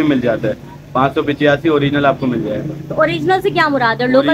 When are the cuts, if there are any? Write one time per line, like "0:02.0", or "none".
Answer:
none